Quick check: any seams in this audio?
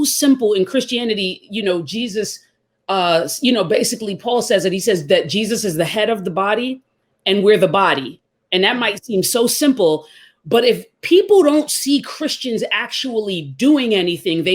no; 0 cuts

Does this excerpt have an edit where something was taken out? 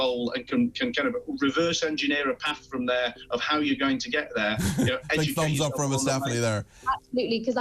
no; 0 cuts

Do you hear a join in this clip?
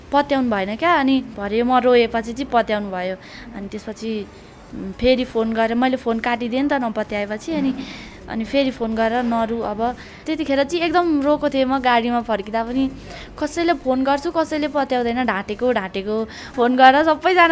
yes; 3 cuts; at 1.4 s, 10.2 s, 16.5 s

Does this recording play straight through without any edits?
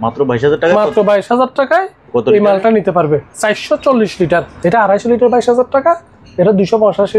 no; 1 cut; at 4.5 s

